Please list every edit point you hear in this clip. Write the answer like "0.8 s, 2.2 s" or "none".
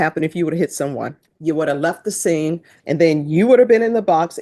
1.3 s, 2.7 s